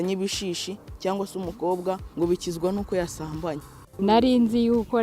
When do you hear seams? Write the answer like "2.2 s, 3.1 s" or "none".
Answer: 2.1 s, 3.8 s